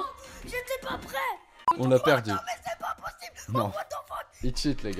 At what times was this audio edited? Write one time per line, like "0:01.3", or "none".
0:01.6